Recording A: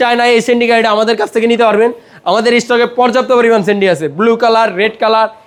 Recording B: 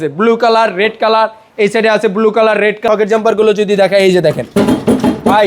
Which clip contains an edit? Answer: B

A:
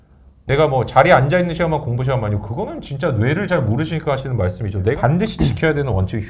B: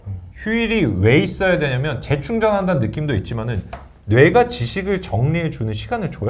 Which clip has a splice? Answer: A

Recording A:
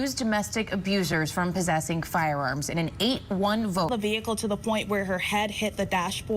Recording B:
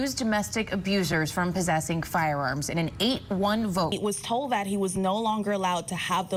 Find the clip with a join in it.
A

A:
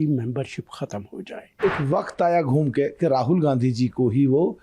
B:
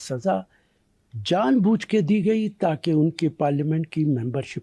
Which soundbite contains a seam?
A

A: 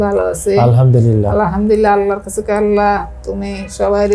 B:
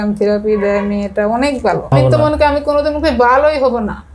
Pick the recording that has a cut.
B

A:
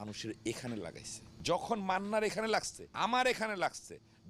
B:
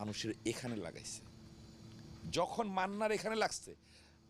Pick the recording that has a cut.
A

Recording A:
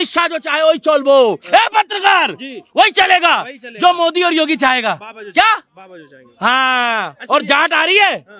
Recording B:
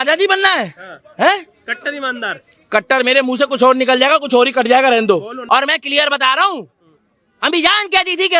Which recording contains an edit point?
B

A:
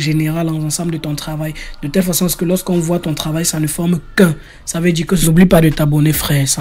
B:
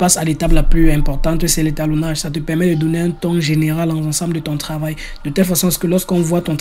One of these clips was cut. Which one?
A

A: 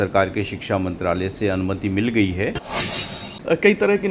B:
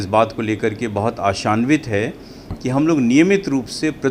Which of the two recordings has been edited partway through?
A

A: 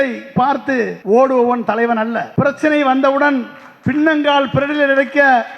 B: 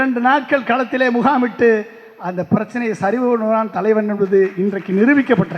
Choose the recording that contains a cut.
A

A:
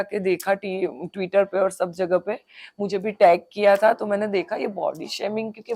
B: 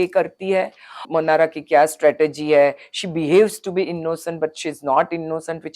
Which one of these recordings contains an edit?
B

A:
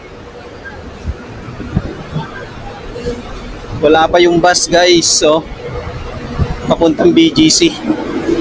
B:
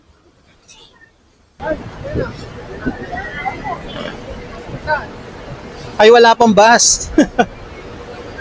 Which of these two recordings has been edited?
B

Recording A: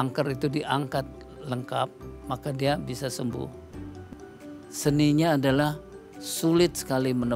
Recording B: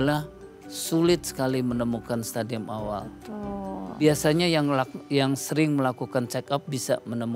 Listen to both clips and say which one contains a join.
A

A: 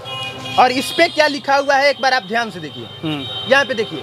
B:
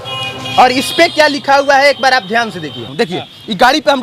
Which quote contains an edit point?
B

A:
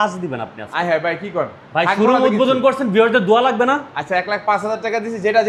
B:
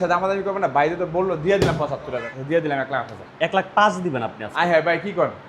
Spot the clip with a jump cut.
B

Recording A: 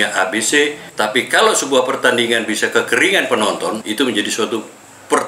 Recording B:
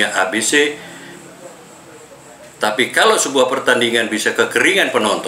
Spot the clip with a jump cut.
A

